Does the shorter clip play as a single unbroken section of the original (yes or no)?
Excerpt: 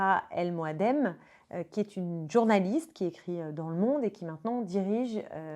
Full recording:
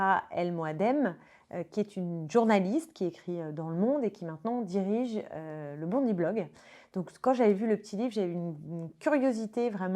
yes